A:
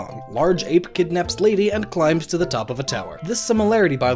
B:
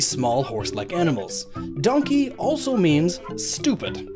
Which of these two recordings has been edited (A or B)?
A